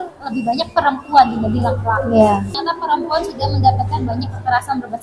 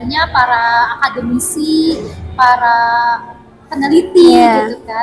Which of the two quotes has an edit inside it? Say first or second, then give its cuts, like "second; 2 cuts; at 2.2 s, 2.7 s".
first; 1 cut; at 2.6 s